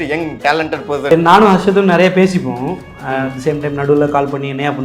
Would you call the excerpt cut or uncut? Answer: cut